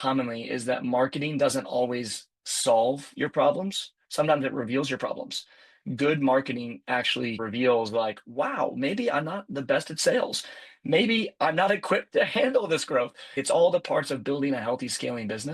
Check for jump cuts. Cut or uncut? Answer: cut